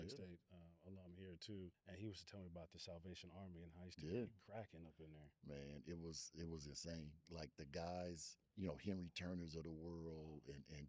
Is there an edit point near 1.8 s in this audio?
yes; 3 cuts; at 1.8 s, 7.3 s, 8.4 s

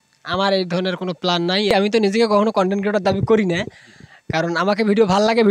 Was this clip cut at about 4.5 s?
no; 1 cut; at 1.8 s

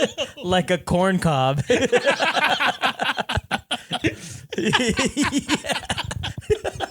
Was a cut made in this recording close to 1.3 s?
no; 1 cut; at 4.0 s

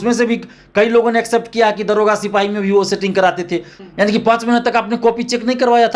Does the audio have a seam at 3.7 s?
yes; 1 cut; at 3.7 s

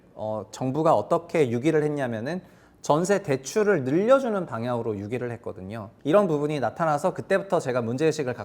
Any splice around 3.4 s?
no; 1 cut; at 5.9 s

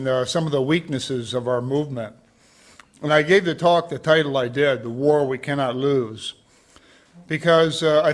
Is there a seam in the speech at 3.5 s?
yes; 1 cut; at 3.5 s

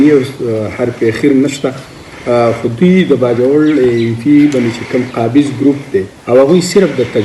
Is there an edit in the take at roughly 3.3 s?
no; 1 cut; at 6.1 s

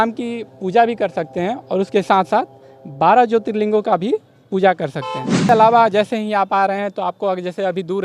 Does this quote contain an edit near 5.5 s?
yes; 1 cut; at 5.5 s

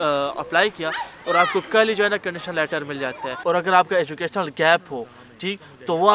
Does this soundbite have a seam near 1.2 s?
no; 1 cut; at 3.3 s

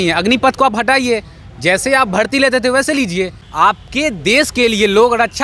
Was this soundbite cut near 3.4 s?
yes; 1 cut; at 3.4 s

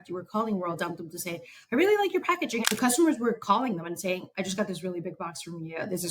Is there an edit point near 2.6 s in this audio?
yes; 1 cut; at 2.6 s

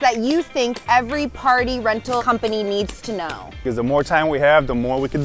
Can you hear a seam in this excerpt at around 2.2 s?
yes; 2 cuts; at 2.2 s, 3.5 s

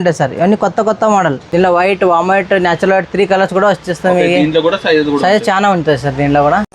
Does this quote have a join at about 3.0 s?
no; 1 cut; at 1.4 s

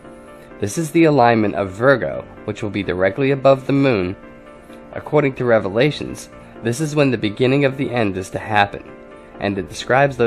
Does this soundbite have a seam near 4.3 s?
yes; 1 cut; at 4.3 s

